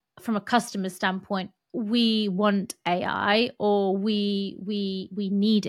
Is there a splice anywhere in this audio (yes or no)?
no